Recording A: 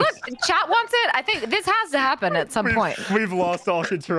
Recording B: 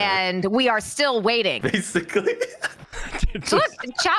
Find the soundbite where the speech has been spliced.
B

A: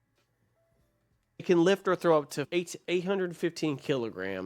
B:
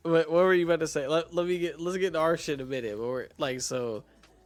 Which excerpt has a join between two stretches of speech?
A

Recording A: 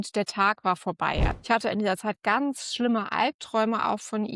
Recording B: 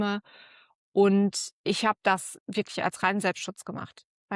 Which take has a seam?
A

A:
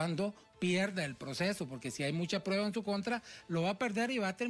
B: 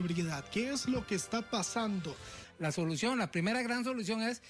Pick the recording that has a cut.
B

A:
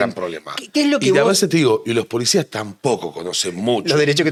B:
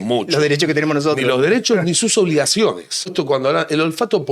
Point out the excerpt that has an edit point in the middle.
B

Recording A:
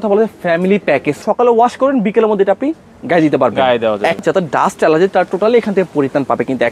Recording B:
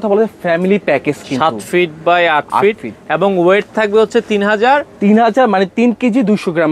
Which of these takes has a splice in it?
A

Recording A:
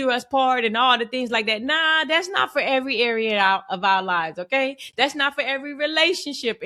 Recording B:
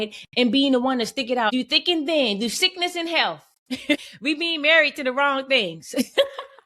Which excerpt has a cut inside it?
B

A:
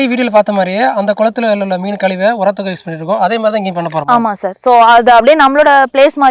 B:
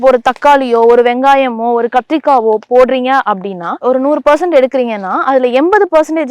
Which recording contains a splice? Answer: B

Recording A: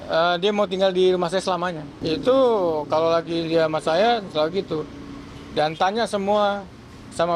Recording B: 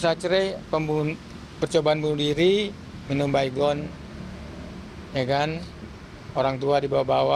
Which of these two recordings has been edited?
A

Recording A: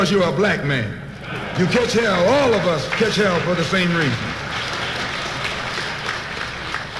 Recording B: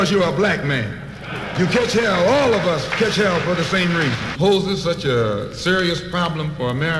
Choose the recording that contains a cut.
A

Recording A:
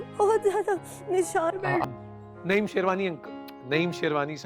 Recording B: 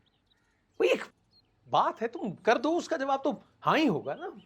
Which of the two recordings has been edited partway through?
A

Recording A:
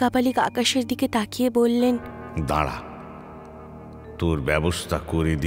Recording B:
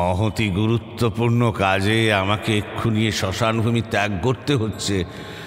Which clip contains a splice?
A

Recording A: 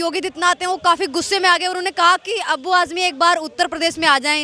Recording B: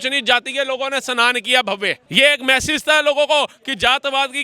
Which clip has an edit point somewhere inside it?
B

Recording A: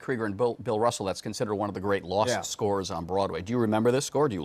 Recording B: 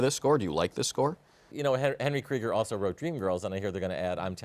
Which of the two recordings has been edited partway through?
B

